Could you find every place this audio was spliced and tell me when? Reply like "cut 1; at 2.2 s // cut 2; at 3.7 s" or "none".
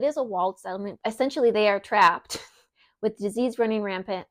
cut 1; at 0.9 s